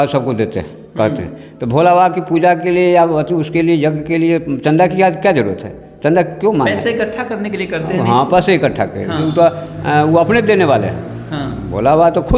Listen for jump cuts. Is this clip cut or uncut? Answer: uncut